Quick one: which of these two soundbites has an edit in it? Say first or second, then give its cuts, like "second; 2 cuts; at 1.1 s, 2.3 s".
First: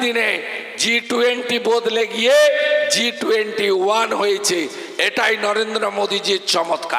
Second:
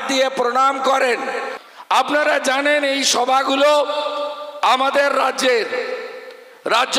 second; 1 cut; at 1.5 s